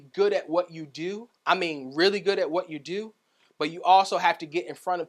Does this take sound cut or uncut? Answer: uncut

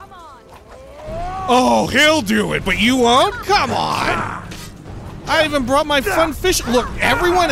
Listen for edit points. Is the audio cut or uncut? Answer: cut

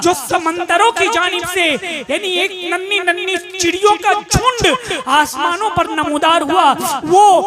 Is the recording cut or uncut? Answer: uncut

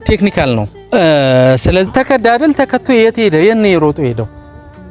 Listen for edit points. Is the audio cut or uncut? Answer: cut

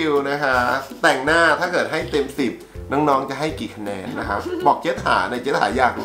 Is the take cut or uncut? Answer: uncut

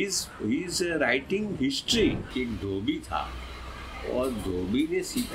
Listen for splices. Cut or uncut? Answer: cut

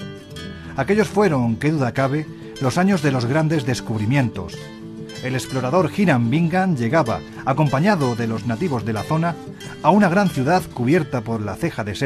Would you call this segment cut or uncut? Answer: uncut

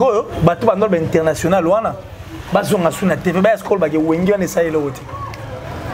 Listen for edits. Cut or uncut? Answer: uncut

